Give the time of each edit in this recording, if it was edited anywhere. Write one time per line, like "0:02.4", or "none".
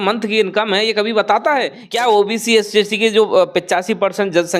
0:01.8

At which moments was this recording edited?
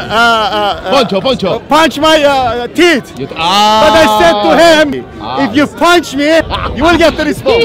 0:04.9
0:06.6

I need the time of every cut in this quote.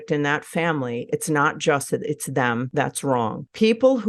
0:02.9

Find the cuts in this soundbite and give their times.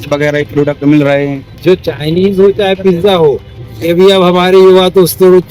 0:01.4

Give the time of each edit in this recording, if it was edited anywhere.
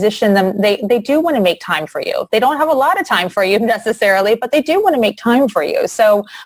none

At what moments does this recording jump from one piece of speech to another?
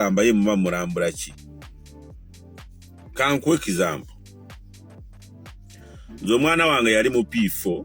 none

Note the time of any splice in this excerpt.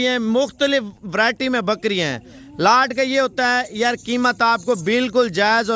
none

